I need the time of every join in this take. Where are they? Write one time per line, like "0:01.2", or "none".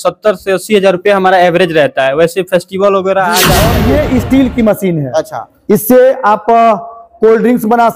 0:03.6